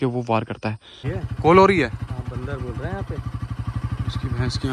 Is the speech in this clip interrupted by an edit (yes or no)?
yes